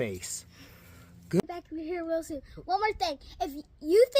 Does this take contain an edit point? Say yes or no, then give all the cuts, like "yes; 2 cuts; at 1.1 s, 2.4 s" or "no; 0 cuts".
yes; 1 cut; at 1.4 s